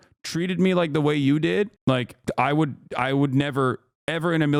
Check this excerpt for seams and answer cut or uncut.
uncut